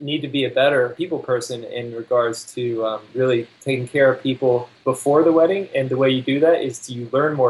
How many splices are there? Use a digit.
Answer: 3